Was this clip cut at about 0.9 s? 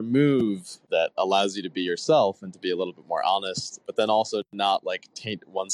yes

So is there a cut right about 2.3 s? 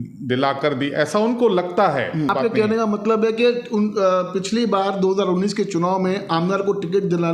yes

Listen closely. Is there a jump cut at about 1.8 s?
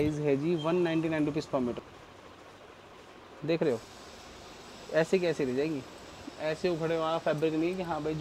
yes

